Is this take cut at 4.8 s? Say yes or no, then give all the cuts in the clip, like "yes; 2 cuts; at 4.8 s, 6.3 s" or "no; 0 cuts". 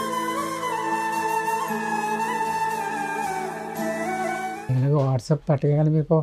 yes; 1 cut; at 4.8 s